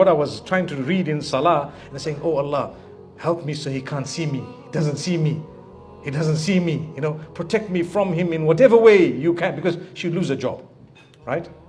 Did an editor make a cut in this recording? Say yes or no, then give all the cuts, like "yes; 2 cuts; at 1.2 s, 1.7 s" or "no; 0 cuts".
no; 0 cuts